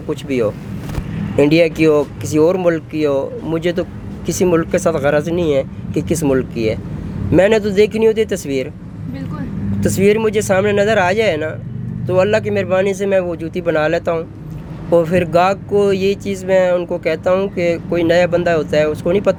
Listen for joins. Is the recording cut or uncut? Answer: uncut